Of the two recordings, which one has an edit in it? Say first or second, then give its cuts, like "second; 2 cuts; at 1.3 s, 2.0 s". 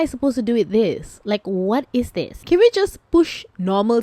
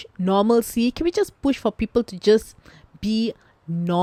first; 1 cut; at 2.4 s